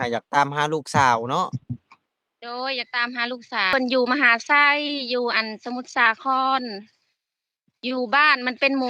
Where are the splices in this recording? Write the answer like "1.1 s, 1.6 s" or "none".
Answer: 3.7 s